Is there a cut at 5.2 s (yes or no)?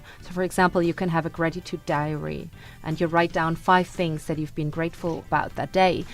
yes